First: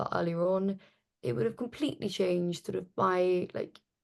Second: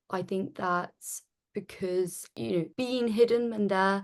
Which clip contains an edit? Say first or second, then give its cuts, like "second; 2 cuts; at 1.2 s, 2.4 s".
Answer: second; 1 cut; at 2.3 s